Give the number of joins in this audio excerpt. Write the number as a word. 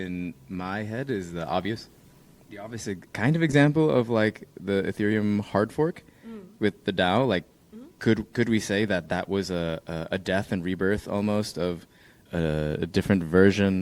two